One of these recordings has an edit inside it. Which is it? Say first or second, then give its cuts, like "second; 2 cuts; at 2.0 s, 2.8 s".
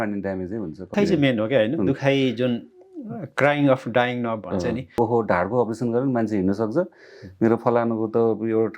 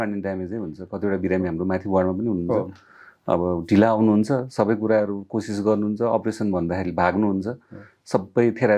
first; 2 cuts; at 0.9 s, 5.0 s